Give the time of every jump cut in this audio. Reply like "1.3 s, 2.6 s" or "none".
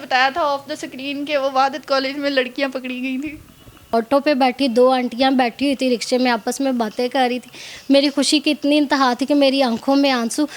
3.9 s